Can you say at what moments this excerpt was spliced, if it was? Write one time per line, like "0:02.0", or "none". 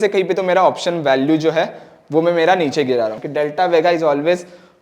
0:03.2